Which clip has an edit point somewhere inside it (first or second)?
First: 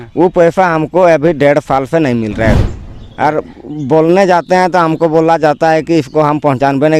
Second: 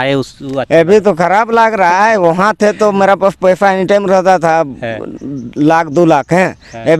first